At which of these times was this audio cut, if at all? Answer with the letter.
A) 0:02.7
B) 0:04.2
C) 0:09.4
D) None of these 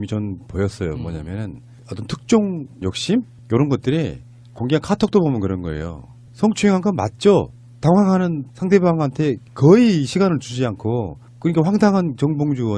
A